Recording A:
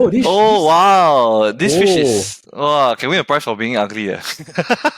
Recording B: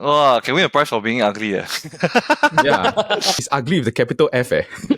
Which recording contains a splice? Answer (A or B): B